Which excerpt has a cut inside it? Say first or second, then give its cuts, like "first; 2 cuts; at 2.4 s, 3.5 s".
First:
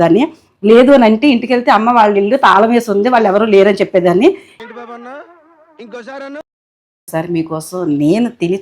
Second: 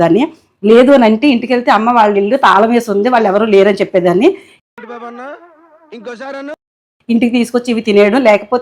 first; 2 cuts; at 4.6 s, 6.9 s